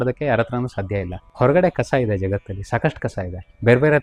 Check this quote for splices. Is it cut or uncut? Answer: uncut